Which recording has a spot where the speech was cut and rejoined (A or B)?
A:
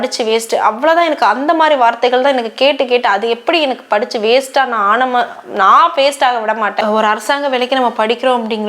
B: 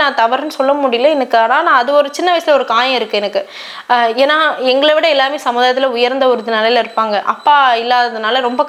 A